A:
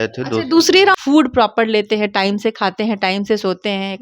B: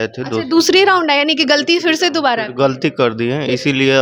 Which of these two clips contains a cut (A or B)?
A